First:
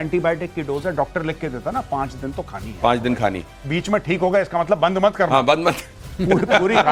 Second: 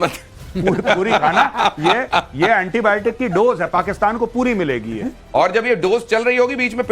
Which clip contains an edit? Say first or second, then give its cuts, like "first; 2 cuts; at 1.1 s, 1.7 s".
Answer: second; 1 cut; at 5.6 s